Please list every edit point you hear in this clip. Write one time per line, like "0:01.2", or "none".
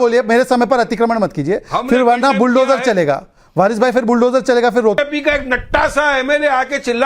0:05.0